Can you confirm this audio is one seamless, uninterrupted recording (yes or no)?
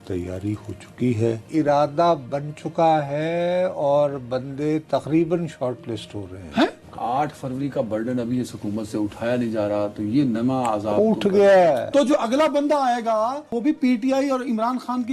no